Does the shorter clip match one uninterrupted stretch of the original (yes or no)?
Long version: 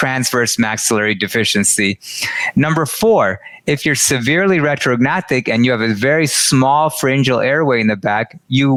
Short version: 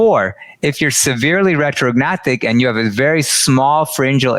yes